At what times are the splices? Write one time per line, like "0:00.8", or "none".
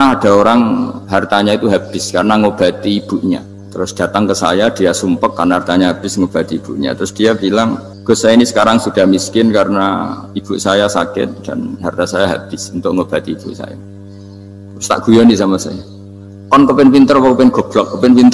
0:01.0
0:03.6
0:07.9